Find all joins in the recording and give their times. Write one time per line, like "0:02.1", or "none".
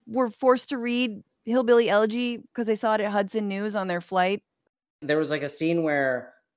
0:05.0